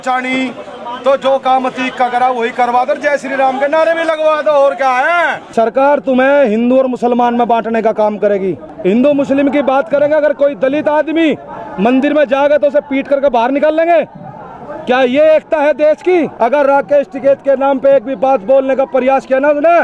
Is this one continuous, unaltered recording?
no; 3 cuts; at 5.4 s, 8.7 s, 16.3 s

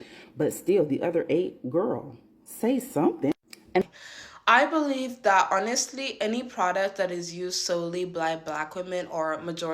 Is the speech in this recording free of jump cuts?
no; 1 cut; at 3.8 s

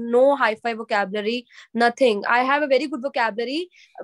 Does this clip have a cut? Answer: no; 0 cuts

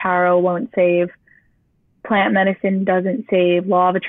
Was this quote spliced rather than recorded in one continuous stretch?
no; 0 cuts

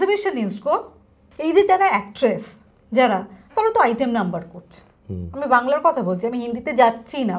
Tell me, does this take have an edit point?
no; 0 cuts

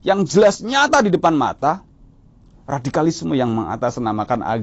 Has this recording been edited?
no; 0 cuts

